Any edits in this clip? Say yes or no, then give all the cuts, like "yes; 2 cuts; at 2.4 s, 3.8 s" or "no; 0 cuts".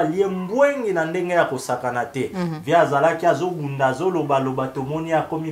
no; 0 cuts